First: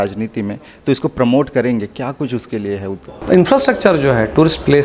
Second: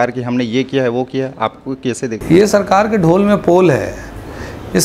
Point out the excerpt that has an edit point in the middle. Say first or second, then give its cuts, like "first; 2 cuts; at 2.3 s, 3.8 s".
first; 1 cut; at 2.9 s